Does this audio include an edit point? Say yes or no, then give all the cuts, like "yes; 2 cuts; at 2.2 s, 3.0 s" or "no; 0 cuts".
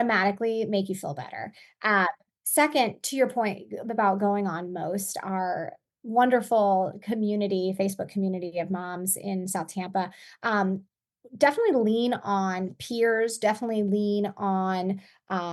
no; 0 cuts